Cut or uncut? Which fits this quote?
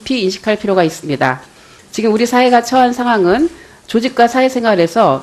cut